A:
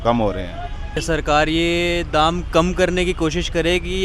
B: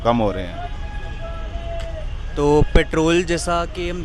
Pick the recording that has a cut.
A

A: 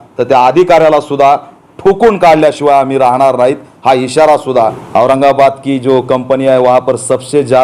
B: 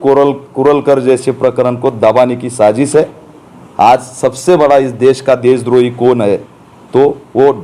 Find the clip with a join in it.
A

